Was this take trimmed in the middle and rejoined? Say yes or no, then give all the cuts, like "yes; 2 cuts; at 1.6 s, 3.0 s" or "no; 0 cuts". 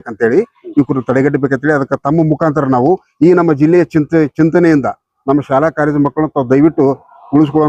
no; 0 cuts